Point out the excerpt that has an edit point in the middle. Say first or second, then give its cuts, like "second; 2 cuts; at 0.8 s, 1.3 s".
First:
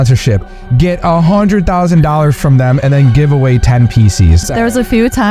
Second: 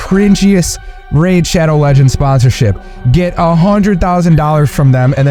first; 1 cut; at 4.4 s